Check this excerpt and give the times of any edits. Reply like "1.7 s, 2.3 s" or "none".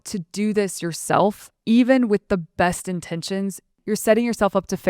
3.8 s